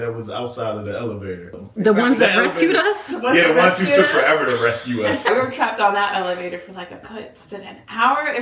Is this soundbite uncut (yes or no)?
no